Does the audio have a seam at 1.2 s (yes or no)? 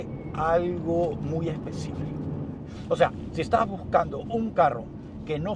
no